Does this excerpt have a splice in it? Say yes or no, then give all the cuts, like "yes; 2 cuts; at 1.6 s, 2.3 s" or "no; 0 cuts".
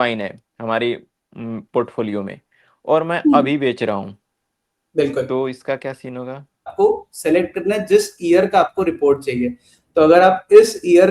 yes; 1 cut; at 6.7 s